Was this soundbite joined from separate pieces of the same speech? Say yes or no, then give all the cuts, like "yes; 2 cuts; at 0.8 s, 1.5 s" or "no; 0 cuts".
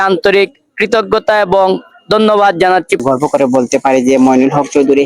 yes; 1 cut; at 3.0 s